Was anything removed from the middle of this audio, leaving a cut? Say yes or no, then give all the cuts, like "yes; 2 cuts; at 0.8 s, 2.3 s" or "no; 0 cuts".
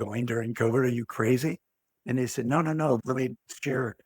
yes; 1 cut; at 3.0 s